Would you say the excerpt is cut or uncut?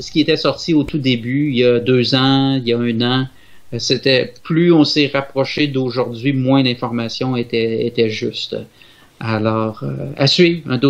uncut